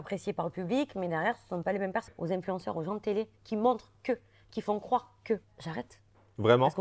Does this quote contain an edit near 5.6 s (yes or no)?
yes